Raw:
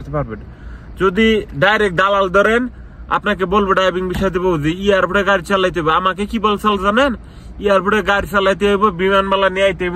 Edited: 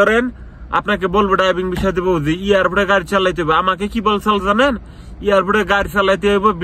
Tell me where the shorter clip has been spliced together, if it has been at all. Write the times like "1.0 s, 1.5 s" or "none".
none